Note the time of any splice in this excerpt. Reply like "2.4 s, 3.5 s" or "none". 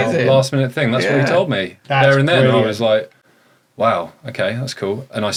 none

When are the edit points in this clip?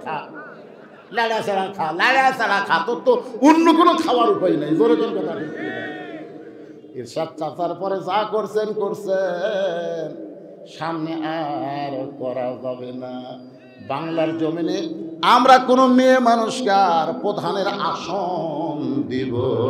6.8 s

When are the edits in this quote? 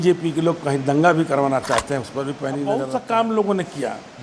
2.8 s

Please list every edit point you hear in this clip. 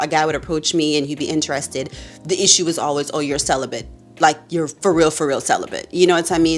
none

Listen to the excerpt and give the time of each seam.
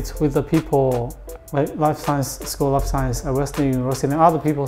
1.2 s

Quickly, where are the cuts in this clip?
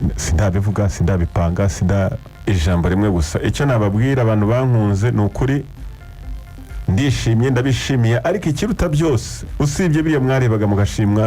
2.3 s

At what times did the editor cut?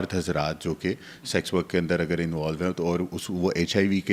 none

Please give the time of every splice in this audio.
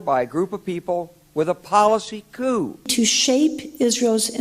2.9 s

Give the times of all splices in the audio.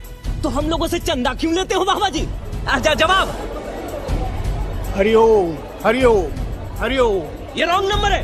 none

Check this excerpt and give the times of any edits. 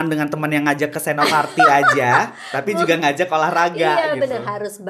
none

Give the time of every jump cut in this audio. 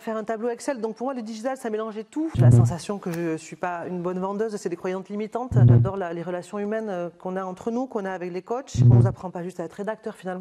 2.4 s, 5.7 s, 8.9 s

